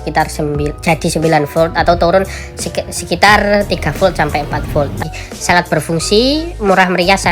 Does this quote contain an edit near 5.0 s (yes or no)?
yes